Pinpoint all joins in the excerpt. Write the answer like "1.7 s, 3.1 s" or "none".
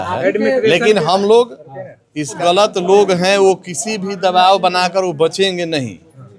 2.4 s